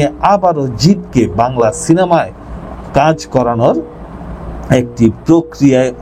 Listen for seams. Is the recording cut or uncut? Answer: uncut